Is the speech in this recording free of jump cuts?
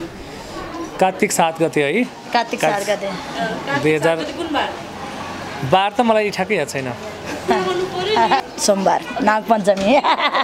no; 1 cut; at 8.4 s

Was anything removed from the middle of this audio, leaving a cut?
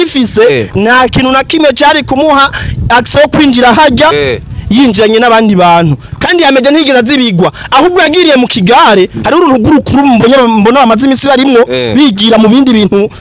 no; 0 cuts

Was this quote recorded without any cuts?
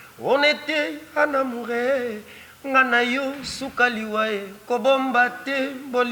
yes; 0 cuts

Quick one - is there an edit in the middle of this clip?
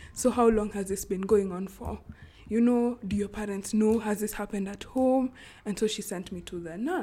no; 0 cuts

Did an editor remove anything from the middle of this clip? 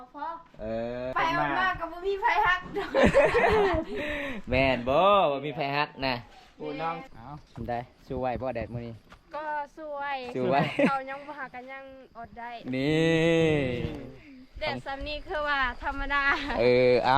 yes; 2 cuts; at 1.1 s, 7.1 s

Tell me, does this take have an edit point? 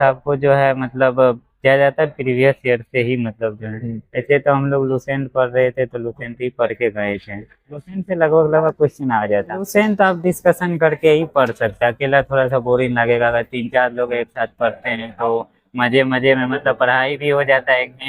yes; 1 cut; at 9.7 s

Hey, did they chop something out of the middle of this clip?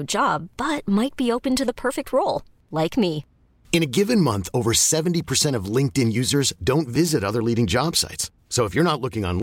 no; 0 cuts

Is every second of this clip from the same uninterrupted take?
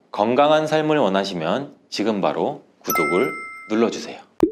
yes; 0 cuts

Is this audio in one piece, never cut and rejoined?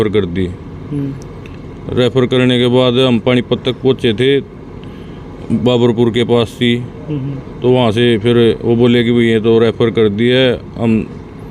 yes; 0 cuts

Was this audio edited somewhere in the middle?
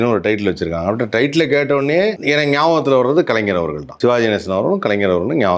yes; 2 cuts; at 2.2 s, 3.8 s

